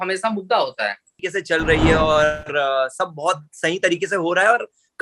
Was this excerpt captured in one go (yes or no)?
no